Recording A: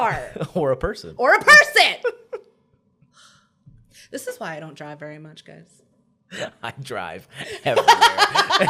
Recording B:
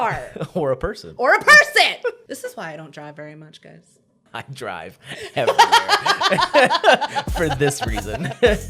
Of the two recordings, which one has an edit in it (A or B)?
B